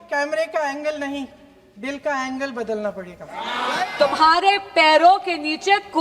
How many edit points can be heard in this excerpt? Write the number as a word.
one